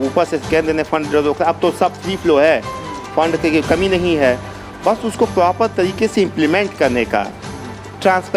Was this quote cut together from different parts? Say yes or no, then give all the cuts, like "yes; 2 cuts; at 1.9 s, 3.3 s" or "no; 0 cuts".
no; 0 cuts